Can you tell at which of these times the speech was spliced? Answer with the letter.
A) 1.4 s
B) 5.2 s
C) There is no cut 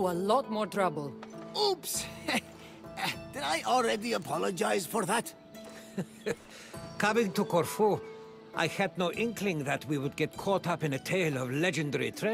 C